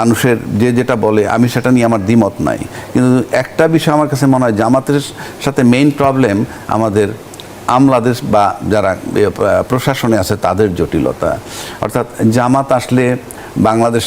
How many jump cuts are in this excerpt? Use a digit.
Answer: 0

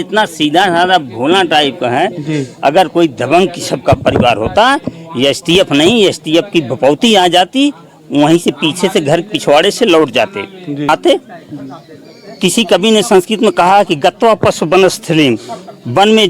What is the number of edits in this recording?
1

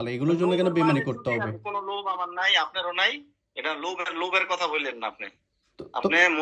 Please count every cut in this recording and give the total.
0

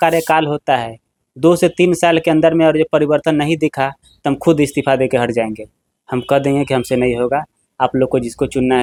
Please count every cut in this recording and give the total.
0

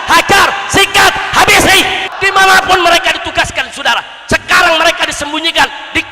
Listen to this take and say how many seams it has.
1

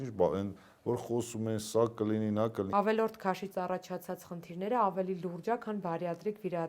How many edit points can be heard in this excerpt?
1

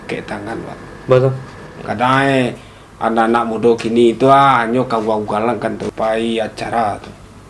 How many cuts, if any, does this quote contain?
1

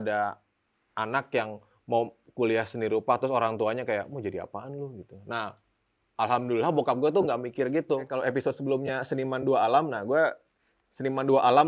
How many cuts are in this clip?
1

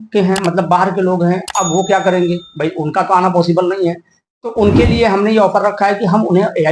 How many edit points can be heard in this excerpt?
0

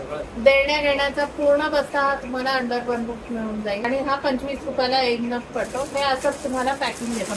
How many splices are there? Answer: 1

